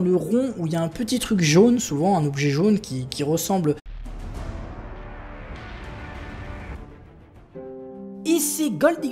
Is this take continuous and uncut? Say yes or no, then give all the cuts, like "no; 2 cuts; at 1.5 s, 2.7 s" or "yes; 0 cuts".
yes; 0 cuts